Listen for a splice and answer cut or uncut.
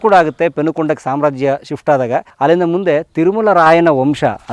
cut